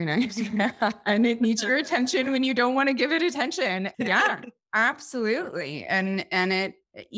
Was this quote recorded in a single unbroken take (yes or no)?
no